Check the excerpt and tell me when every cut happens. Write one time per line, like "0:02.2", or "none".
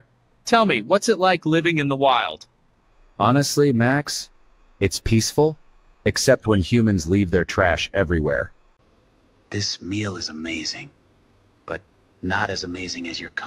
0:08.7